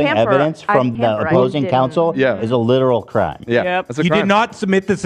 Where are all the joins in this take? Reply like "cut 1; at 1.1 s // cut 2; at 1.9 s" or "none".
cut 1; at 0.9 s